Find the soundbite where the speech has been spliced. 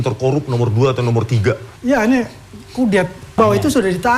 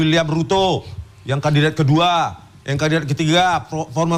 first; 2 cuts; at 1.7 s, 3.2 s

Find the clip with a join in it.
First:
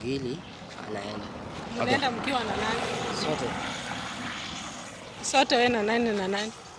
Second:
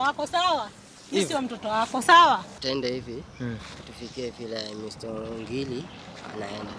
second; 1 cut; at 2.5 s

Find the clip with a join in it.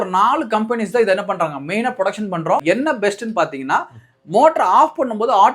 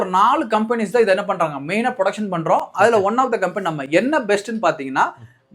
first; 1 cut; at 2.6 s

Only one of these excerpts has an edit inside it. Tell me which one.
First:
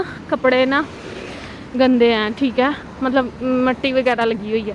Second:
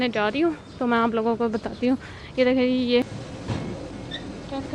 second; 1 cut; at 3.2 s

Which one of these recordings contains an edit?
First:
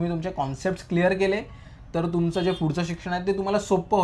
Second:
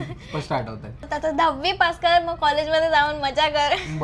second; 1 cut; at 1.1 s

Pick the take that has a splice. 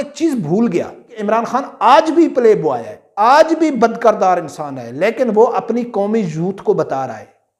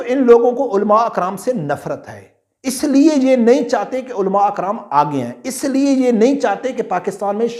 first; 1 cut; at 1.1 s

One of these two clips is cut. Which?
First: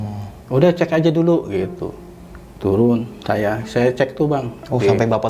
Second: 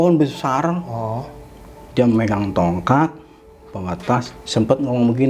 second; 1 cut; at 4.3 s

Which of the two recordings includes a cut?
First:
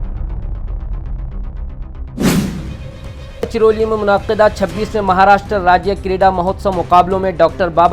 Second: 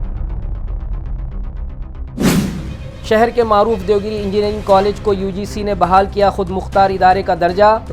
second; 1 cut; at 2.9 s

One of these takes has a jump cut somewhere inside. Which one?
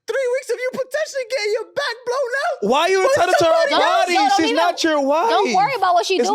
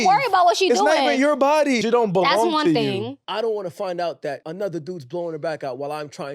second; 3 cuts; at 1.8 s, 3.2 s, 4.5 s

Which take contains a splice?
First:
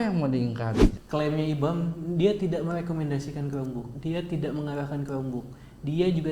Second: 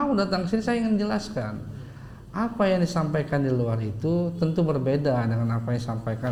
first; 1 cut; at 0.9 s

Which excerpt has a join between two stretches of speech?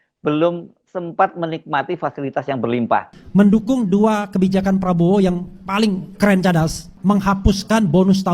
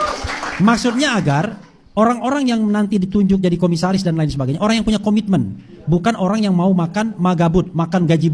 first; 2 cuts; at 3.1 s, 6.9 s

